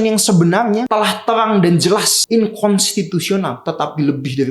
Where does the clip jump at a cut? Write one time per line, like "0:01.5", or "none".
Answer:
0:00.9
0:02.2
0:03.6